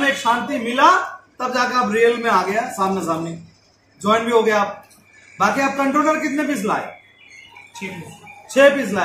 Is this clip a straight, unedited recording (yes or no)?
yes